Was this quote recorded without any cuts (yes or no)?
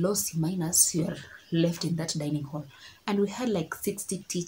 yes